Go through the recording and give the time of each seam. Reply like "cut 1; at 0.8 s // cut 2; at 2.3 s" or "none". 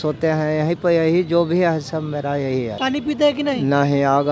cut 1; at 2.8 s